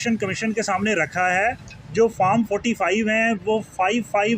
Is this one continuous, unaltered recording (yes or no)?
yes